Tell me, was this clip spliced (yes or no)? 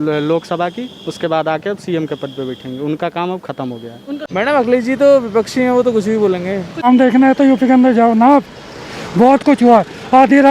yes